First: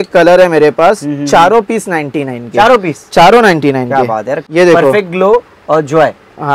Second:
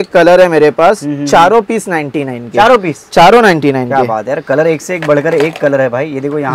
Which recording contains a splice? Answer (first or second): first